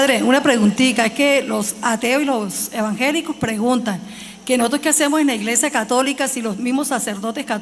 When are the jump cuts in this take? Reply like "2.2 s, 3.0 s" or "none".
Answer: none